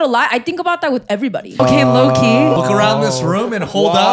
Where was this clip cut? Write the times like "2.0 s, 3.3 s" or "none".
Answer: 1.6 s, 2.6 s